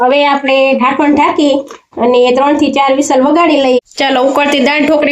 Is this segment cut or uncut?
cut